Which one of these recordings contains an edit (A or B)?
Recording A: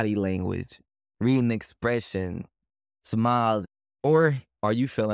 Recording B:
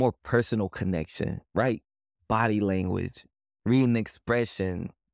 A